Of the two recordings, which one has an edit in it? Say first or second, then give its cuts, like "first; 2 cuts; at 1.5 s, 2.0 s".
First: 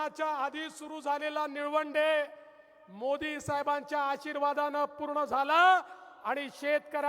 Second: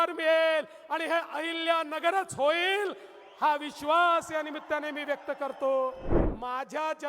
second; 1 cut; at 6.1 s